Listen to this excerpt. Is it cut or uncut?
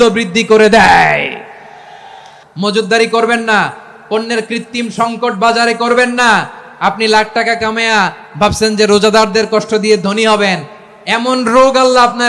cut